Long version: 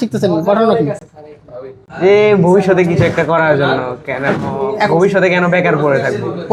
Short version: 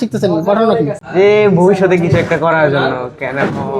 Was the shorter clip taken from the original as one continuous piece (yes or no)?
no